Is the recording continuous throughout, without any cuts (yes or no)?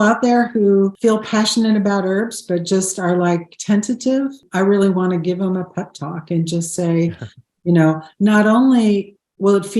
no